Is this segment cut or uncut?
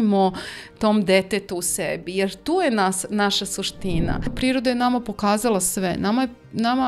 cut